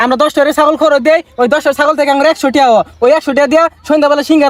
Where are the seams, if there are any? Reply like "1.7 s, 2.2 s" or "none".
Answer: none